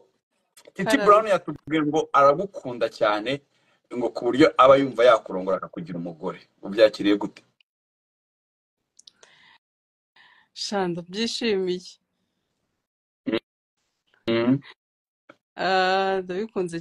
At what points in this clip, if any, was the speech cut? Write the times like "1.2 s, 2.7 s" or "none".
none